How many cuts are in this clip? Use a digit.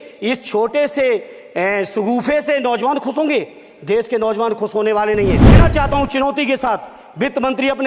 1